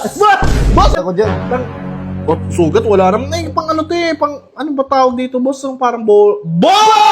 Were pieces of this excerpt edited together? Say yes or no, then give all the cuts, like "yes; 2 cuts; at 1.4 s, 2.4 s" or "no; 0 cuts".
yes; 1 cut; at 0.9 s